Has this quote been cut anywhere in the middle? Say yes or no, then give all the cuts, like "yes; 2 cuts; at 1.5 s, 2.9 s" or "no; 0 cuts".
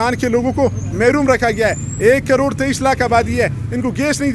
no; 0 cuts